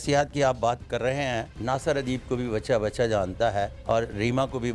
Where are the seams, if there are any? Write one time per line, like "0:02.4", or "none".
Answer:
0:01.5
0:03.8

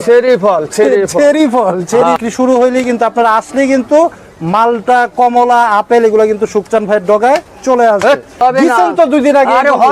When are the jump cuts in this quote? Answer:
0:02.2
0:08.4

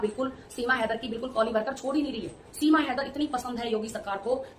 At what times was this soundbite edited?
none

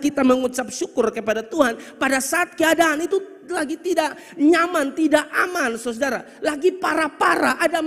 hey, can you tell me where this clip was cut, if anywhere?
none

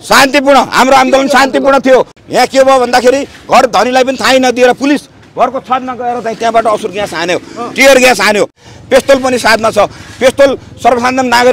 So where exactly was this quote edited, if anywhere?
0:02.2
0:08.6

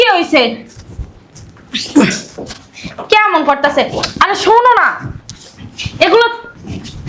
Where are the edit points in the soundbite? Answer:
none

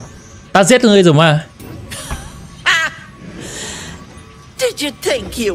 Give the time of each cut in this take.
0:01.6

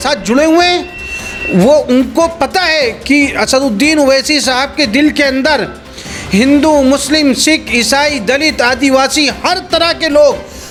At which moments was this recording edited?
none

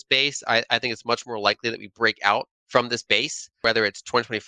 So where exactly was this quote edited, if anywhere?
0:02.6
0:03.4

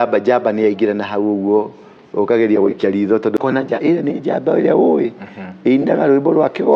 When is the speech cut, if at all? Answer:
0:03.4

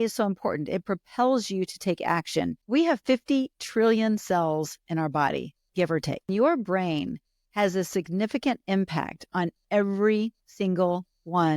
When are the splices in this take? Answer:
0:02.6
0:06.3

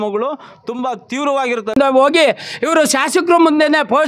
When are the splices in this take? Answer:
0:01.8

